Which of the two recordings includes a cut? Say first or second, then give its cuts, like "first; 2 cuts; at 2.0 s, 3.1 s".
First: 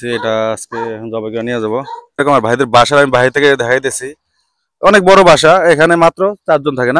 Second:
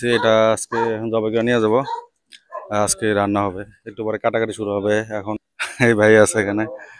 first; 1 cut; at 2.2 s